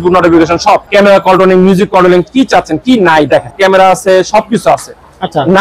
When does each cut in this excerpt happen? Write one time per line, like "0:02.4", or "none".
0:00.9
0:03.5